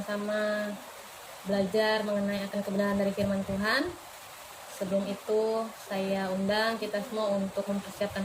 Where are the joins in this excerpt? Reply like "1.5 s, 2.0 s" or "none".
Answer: none

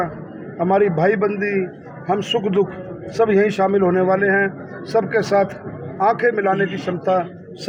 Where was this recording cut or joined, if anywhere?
none

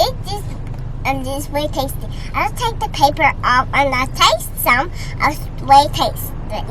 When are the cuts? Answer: none

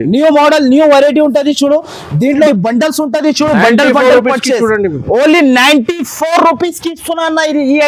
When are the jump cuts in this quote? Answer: 2.5 s

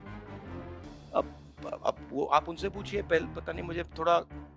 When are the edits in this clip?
1.1 s

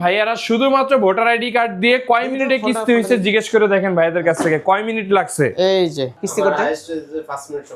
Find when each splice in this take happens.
6.1 s

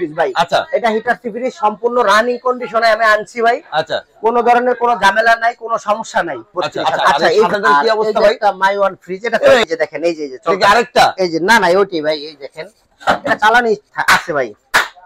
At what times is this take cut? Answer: 7.5 s, 9.6 s

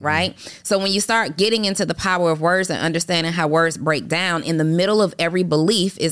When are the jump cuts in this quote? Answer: none

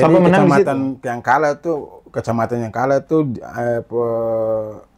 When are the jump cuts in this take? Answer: none

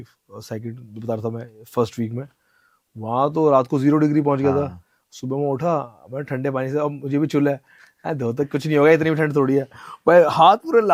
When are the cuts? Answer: none

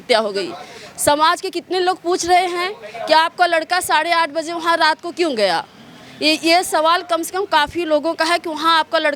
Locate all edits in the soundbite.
none

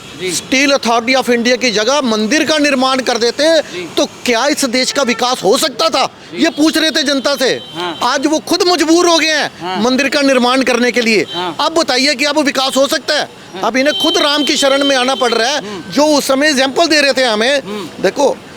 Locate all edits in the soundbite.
none

